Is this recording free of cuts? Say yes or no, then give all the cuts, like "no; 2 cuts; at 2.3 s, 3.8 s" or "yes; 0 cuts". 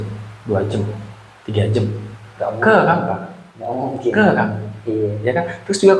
yes; 0 cuts